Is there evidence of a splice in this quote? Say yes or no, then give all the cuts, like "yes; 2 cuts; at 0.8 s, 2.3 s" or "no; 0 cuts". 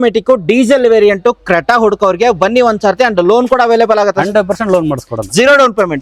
no; 0 cuts